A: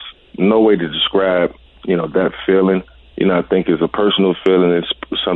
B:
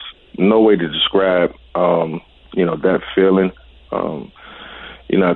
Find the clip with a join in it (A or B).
A